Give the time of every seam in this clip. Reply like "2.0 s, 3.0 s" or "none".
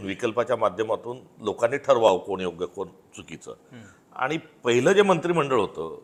none